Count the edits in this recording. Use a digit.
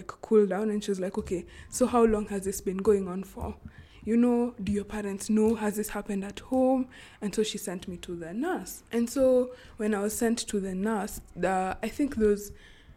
0